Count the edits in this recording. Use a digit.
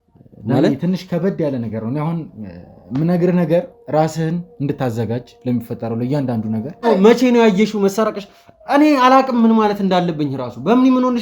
1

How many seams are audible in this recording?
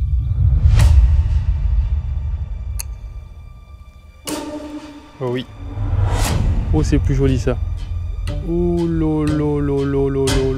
1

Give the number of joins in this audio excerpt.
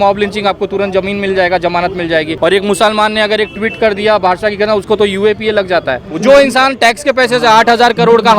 2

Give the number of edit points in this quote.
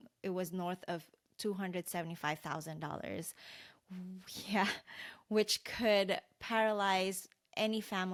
0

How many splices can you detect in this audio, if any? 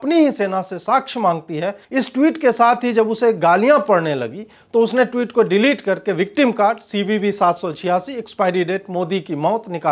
1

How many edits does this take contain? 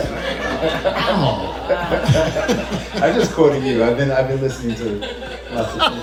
0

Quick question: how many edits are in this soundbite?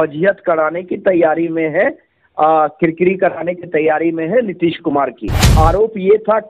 1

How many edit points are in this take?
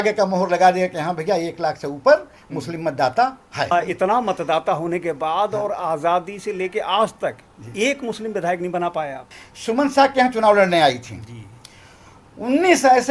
2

